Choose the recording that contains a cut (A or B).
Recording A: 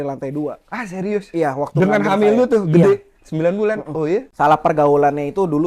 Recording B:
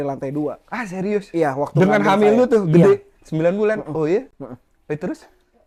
A